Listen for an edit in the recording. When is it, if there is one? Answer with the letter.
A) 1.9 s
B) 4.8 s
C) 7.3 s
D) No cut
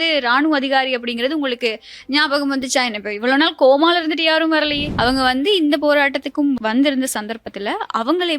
B